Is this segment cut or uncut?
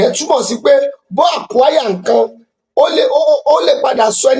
uncut